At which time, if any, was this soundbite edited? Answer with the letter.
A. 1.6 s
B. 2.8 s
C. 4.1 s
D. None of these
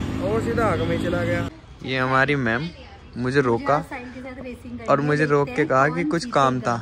A